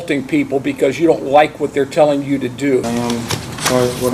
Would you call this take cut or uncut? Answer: cut